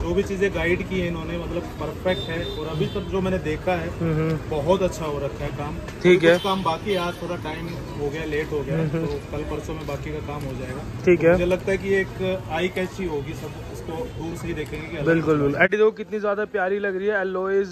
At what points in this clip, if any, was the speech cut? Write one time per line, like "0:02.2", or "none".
0:15.7